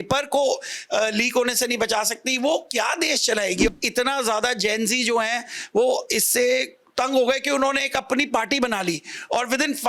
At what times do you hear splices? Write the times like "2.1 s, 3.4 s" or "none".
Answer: 3.7 s